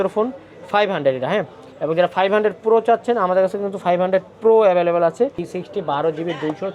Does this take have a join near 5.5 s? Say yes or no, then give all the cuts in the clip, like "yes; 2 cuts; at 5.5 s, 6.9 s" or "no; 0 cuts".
yes; 1 cut; at 5.5 s